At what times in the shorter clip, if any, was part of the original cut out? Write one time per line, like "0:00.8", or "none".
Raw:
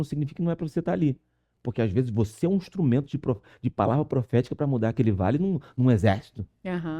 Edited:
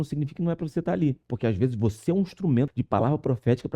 0:01.3
0:02.8

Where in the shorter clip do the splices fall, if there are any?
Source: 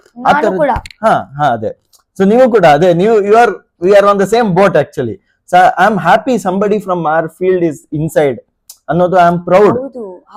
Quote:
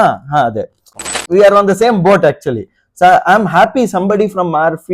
0:01.1

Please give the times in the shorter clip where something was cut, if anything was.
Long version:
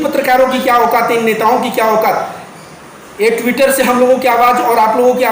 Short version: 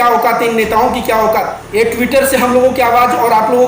0:01.6

